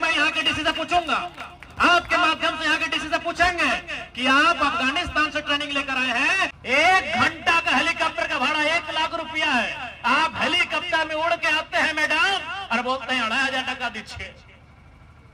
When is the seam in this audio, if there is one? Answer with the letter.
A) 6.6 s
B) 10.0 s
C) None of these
A